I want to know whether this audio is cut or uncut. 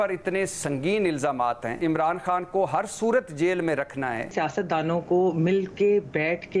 cut